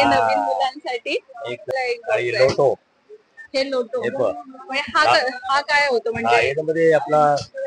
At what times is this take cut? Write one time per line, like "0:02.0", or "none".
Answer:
0:01.7